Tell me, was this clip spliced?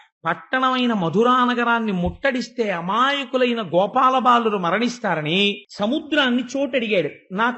yes; 1 cut; at 5.7 s

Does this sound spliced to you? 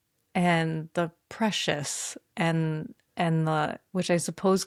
no; 0 cuts

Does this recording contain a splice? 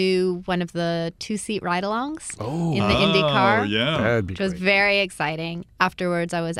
yes; 1 cut; at 5.6 s

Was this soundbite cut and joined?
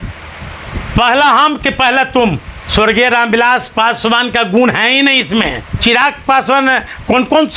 yes; 2 cuts; at 2.6 s, 5.8 s

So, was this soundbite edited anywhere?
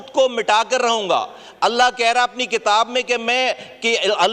no; 0 cuts

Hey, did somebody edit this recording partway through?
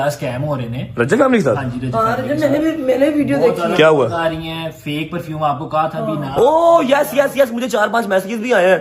no; 0 cuts

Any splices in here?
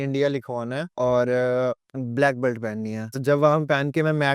yes; 3 cuts; at 0.9 s, 1.9 s, 3.2 s

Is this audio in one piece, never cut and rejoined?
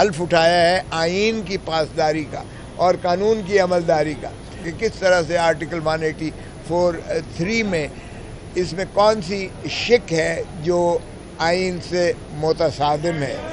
no; 1 cut; at 4.7 s

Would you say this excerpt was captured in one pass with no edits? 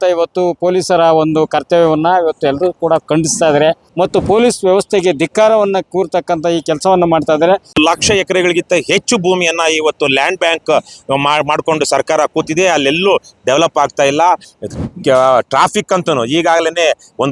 no; 3 cuts; at 3.9 s, 7.7 s, 14.5 s

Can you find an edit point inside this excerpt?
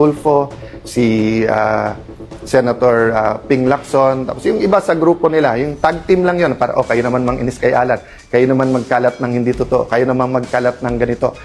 no; 0 cuts

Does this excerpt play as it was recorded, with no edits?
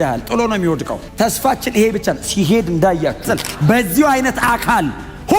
no; 1 cut; at 3.2 s

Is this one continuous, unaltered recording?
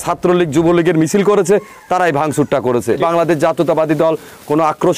no; 1 cut; at 3.0 s

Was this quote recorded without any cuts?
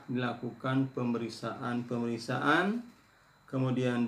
yes; 0 cuts

